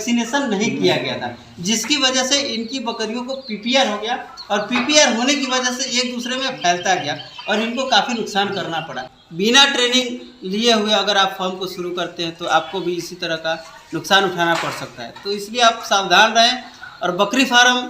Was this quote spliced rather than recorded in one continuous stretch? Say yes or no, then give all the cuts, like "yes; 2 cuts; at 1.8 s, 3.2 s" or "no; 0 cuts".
yes; 1 cut; at 9.0 s